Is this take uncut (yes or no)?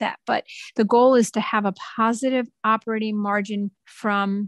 yes